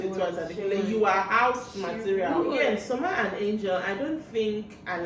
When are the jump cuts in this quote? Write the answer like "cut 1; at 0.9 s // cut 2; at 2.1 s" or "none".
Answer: cut 1; at 2.6 s